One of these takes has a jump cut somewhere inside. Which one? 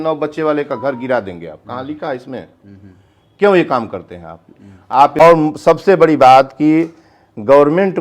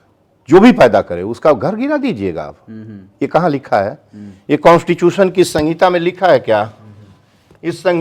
first; 1 cut; at 5.2 s

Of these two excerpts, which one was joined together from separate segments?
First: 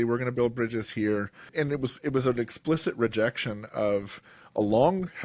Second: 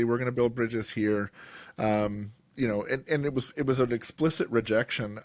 first; 1 cut; at 1.5 s

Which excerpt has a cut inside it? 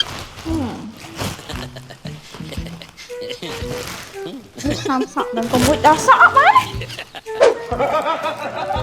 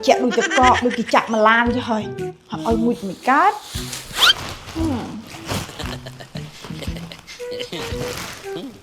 first; 1 cut; at 7.5 s

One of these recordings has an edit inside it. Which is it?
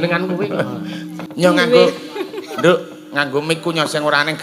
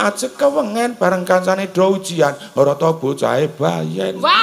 first; 1 cut; at 1.2 s

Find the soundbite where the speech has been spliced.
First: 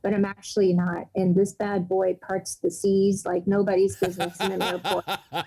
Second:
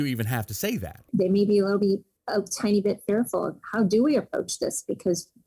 second; 1 cut; at 1.1 s

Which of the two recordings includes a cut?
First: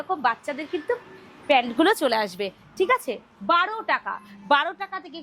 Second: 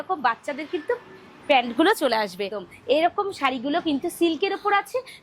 second; 1 cut; at 2.6 s

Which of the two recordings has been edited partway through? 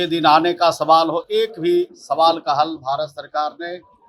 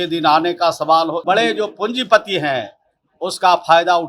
second; 1 cut; at 1.2 s

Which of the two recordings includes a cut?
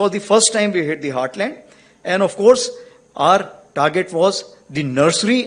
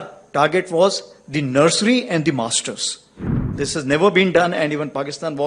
second; 1 cut; at 3.5 s

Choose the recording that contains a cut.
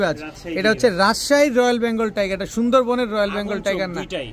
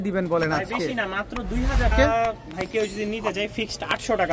second; 1 cut; at 1.9 s

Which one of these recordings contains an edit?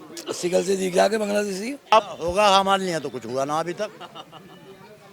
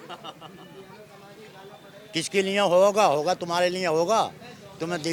first; 1 cut; at 1.9 s

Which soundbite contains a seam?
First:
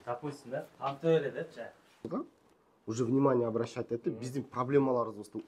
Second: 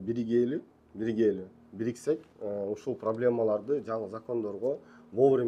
first; 1 cut; at 2.1 s

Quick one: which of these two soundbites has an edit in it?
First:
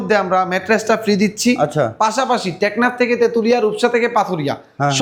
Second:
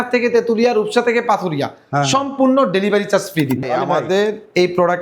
second; 1 cut; at 3.6 s

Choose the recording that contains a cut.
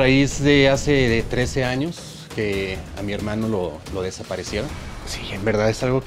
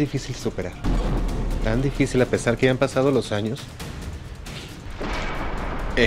first; 1 cut; at 4.7 s

